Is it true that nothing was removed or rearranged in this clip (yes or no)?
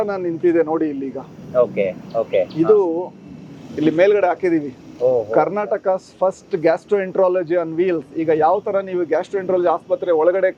yes